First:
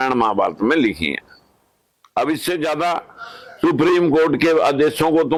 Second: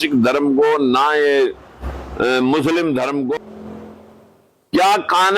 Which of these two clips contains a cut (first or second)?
second